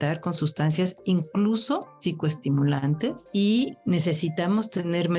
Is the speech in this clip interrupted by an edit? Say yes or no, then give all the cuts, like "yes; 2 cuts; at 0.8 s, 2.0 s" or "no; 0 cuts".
yes; 3 cuts; at 1.9 s, 3.2 s, 3.8 s